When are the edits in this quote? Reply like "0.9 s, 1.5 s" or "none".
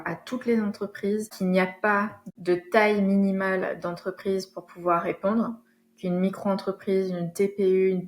1.3 s, 2.2 s